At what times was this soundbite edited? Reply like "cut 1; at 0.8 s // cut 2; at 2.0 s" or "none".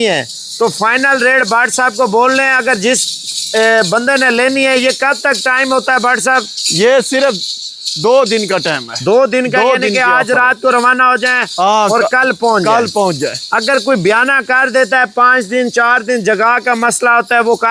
none